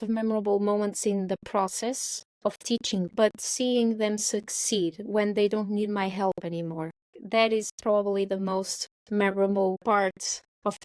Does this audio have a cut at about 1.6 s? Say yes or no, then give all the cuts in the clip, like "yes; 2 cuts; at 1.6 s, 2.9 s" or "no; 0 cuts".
no; 1 cut; at 3.1 s